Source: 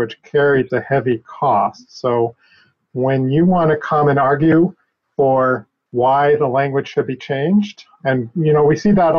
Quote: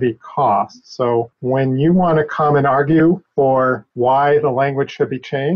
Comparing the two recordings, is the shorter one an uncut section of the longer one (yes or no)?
no